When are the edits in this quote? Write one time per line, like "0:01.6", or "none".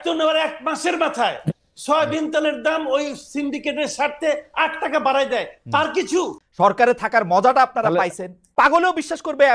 0:06.4
0:08.4